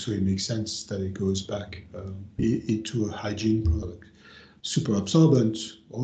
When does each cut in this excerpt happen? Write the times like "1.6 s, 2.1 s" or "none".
none